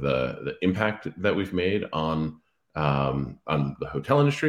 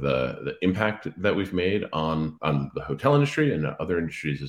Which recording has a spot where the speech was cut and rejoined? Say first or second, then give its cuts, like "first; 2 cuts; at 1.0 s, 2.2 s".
second; 1 cut; at 2.4 s